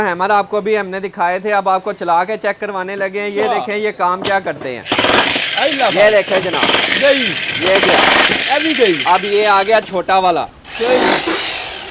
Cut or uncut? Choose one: uncut